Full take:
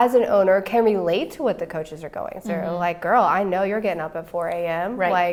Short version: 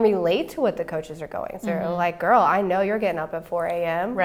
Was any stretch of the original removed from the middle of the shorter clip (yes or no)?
no